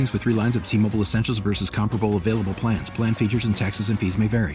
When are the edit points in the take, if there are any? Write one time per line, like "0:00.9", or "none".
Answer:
none